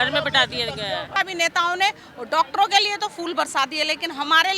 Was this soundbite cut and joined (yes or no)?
yes